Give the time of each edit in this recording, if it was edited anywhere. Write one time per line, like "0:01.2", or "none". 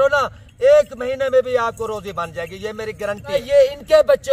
0:03.3